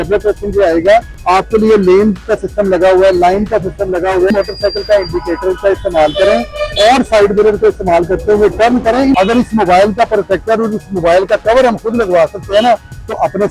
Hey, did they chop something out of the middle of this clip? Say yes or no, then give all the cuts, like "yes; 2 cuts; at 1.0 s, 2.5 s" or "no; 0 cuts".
yes; 3 cuts; at 1.1 s, 4.3 s, 9.1 s